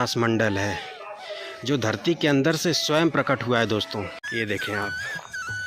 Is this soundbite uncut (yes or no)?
no